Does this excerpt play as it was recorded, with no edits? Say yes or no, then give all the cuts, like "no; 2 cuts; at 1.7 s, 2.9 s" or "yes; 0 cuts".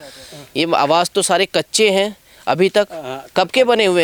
yes; 0 cuts